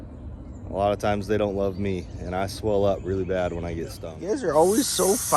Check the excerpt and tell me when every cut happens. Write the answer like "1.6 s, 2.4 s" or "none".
4.1 s